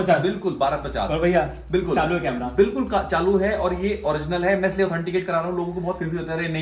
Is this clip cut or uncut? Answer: uncut